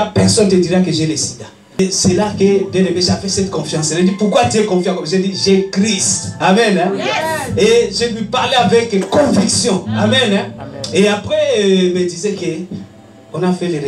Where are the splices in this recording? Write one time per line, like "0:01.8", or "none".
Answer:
0:01.8